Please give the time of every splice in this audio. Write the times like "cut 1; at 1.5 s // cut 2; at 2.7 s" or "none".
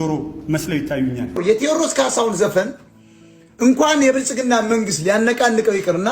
cut 1; at 1.4 s